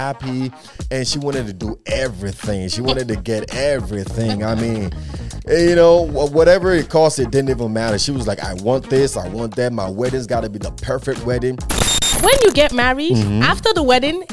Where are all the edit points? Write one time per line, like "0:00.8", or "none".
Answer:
0:11.7